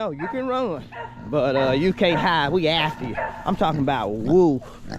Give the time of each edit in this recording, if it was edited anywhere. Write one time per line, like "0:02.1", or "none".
none